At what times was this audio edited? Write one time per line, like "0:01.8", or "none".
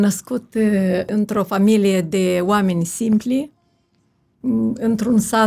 0:01.1

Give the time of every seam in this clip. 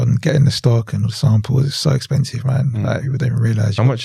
none

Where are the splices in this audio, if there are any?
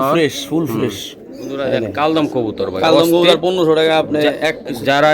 0:01.5

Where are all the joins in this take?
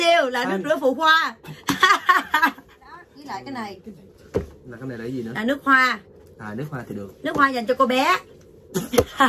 0:03.1

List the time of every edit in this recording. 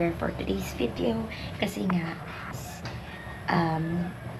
none

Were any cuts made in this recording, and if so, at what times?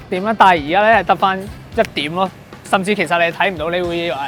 0:01.6

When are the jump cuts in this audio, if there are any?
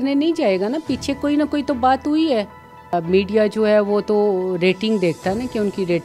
0:02.9

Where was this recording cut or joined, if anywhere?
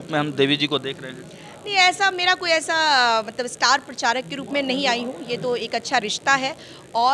none

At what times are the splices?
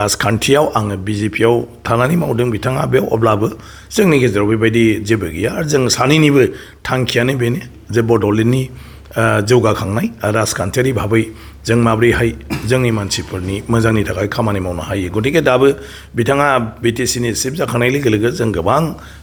none

